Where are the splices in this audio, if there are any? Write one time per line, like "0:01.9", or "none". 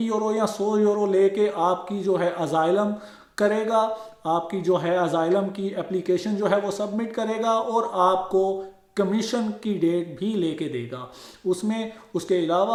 none